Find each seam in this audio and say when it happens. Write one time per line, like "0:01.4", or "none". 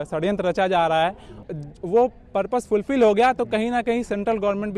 0:01.3